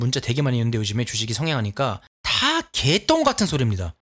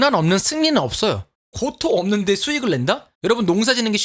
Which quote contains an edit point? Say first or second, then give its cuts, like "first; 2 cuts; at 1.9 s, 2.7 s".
second; 2 cuts; at 1.3 s, 3.1 s